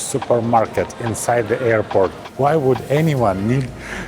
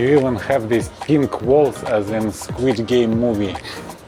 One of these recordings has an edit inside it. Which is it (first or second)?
first